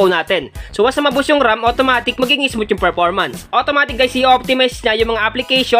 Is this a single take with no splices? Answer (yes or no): no